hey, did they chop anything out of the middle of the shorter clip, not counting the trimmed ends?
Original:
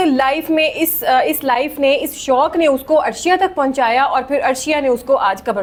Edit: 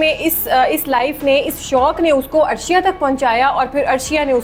no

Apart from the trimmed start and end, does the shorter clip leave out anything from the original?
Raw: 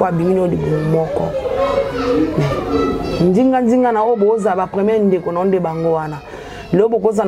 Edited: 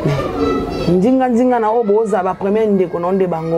no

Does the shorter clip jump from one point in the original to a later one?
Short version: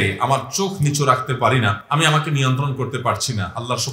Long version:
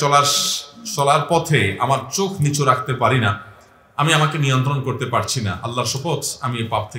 yes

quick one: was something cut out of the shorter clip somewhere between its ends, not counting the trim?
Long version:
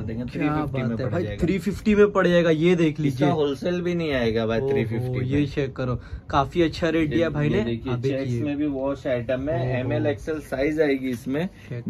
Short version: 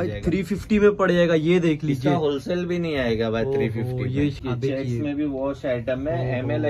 yes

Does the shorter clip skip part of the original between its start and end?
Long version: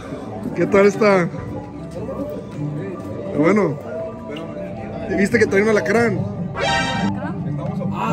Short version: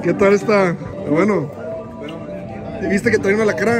yes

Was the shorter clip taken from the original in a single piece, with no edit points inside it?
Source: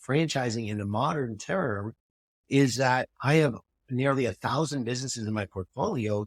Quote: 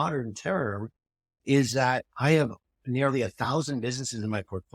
yes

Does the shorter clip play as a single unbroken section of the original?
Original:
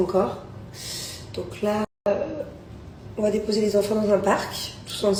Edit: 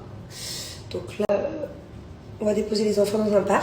no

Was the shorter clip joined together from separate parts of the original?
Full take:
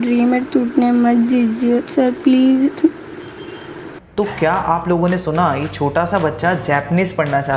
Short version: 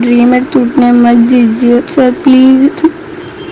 no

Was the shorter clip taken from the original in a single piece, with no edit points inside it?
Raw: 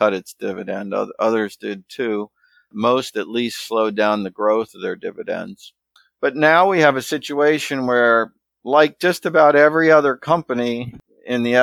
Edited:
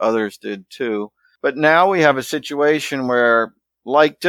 no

